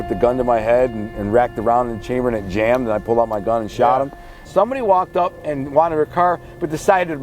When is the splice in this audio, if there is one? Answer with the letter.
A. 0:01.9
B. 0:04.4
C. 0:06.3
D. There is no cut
B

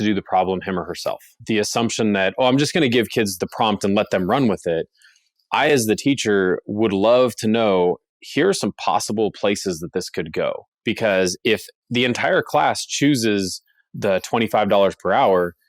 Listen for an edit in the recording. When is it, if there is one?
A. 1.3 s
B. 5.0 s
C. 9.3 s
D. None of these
A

